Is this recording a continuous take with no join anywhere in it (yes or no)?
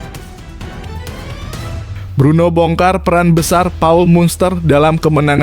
no